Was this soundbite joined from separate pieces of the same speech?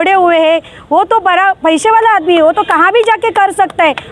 no; 0 cuts

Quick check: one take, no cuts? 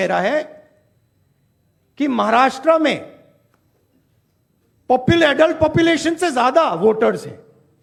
yes; 0 cuts

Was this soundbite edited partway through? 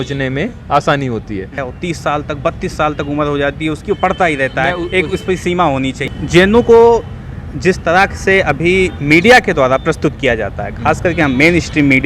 yes; 2 cuts; at 1.6 s, 6.1 s

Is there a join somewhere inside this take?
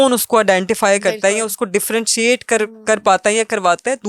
no; 0 cuts

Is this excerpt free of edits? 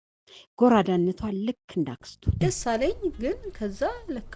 no; 1 cut; at 2.4 s

